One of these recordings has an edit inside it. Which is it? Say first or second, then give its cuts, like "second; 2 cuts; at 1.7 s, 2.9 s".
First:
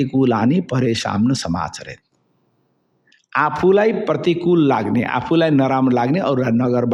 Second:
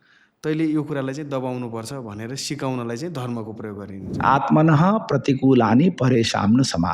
second; 1 cut; at 4.0 s